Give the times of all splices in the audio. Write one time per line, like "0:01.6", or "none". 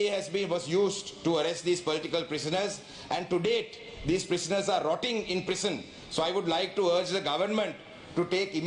none